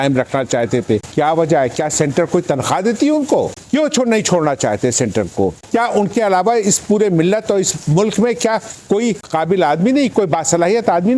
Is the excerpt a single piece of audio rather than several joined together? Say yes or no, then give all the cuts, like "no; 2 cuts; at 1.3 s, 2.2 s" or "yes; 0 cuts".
no; 4 cuts; at 1.1 s, 3.6 s, 5.6 s, 9.3 s